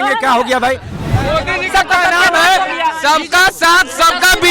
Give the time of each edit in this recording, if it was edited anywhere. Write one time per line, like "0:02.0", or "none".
0:00.9